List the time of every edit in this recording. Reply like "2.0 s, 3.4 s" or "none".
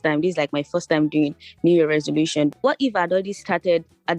2.6 s